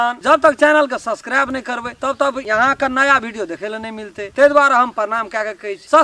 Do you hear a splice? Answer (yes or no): no